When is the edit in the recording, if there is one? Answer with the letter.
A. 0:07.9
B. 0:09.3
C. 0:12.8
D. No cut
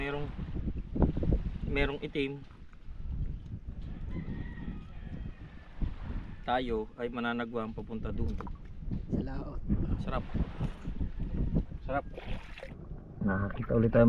C